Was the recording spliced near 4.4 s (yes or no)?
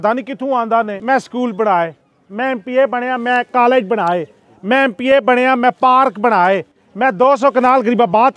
no